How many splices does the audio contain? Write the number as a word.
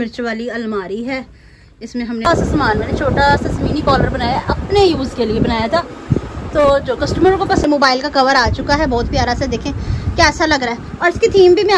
three